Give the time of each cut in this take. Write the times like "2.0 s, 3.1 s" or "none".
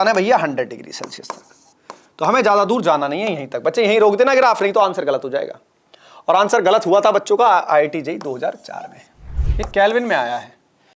9.4 s